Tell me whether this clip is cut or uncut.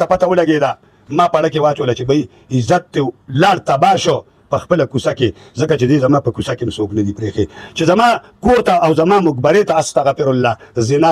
uncut